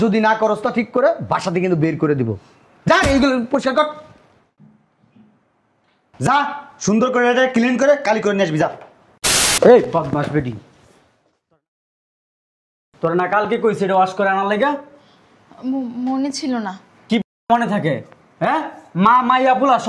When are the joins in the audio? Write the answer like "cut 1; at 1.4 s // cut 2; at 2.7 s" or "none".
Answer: cut 1; at 9.4 s